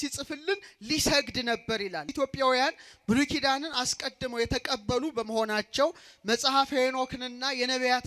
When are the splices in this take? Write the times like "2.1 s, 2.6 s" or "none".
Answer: 2.1 s